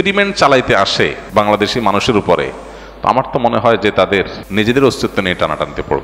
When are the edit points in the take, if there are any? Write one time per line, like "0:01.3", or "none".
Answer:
0:01.2
0:04.4